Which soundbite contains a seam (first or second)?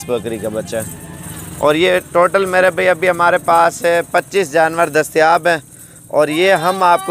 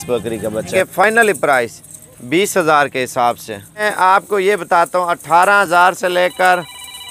second